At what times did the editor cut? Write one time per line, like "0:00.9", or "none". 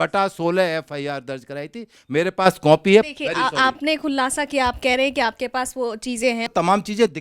0:03.1
0:06.5